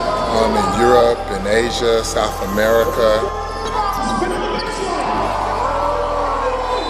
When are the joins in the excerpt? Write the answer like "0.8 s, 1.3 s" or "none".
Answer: 2.4 s, 6.0 s